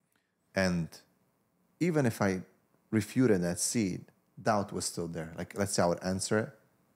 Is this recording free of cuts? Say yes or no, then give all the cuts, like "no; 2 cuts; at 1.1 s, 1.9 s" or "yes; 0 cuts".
yes; 0 cuts